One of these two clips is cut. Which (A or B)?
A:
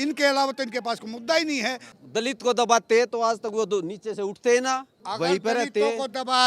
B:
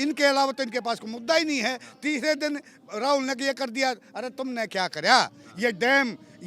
A